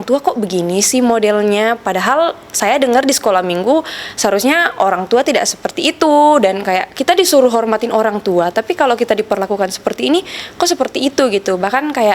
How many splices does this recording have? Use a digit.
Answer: 0